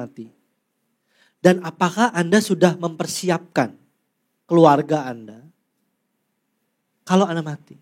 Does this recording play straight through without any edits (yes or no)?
yes